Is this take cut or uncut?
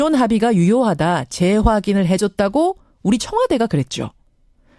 uncut